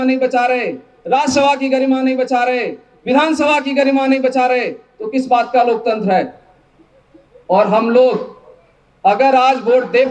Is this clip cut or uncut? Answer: uncut